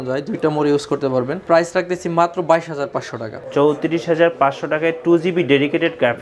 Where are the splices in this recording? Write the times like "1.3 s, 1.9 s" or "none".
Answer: 1.4 s, 3.4 s